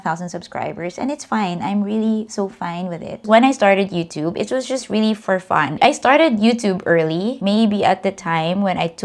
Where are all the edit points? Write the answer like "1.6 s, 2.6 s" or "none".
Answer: 3.2 s, 5.7 s, 7.4 s